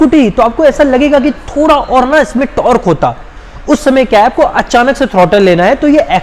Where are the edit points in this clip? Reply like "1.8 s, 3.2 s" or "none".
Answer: none